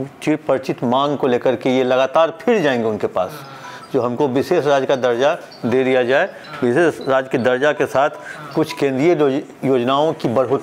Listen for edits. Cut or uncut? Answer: uncut